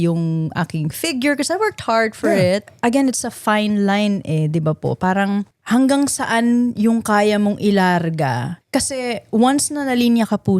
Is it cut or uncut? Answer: cut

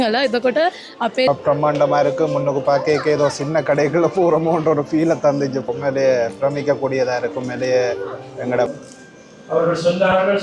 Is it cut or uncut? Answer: cut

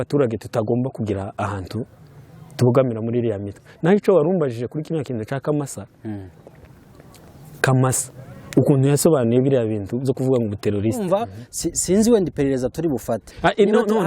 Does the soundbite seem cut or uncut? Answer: cut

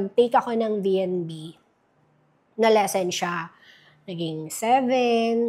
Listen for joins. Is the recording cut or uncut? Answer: uncut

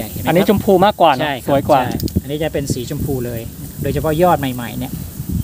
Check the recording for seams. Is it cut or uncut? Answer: uncut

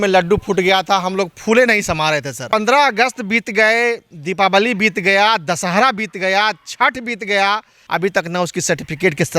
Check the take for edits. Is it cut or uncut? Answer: cut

